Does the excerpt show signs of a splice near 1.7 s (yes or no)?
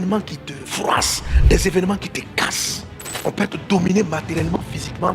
no